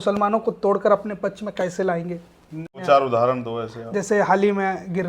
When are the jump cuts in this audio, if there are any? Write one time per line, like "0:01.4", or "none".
0:02.8

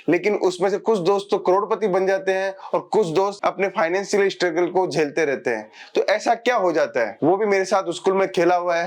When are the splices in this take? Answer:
0:07.1

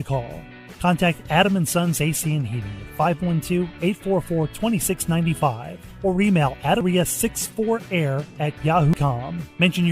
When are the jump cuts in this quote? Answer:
0:06.8
0:08.9

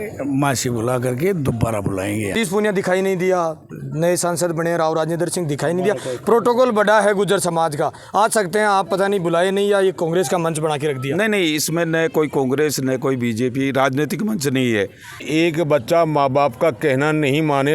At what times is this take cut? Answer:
0:02.3
0:15.3

